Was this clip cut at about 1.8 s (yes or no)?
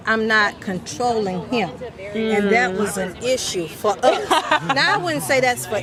no